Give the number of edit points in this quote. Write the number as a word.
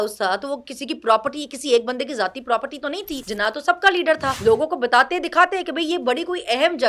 two